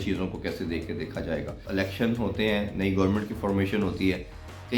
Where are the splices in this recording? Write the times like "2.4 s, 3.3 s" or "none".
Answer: 1.6 s